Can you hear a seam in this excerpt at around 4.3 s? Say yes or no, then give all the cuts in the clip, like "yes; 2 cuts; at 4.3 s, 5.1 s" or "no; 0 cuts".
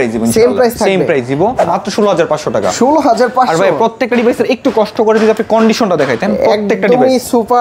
no; 1 cut; at 1.7 s